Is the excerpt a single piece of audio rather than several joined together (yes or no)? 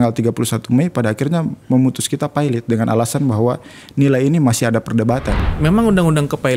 no